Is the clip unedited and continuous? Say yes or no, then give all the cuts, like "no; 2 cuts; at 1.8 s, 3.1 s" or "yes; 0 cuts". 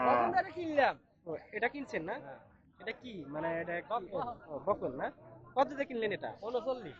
yes; 0 cuts